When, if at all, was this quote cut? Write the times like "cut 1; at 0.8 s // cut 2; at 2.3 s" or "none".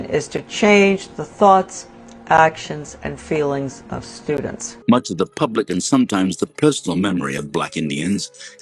cut 1; at 4.6 s